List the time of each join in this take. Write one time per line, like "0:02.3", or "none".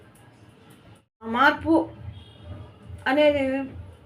0:01.3